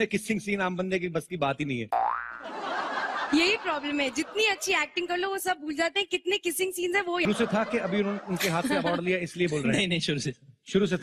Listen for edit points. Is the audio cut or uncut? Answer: cut